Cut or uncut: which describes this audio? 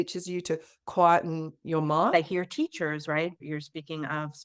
cut